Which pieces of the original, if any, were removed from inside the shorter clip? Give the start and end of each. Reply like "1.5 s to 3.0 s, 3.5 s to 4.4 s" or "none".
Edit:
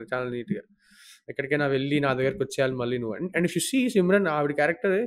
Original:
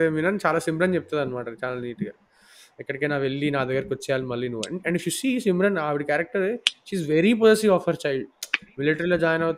none